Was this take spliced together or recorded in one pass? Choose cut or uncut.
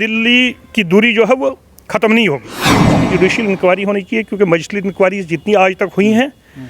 cut